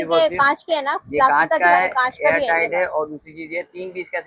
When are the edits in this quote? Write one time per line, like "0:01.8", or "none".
none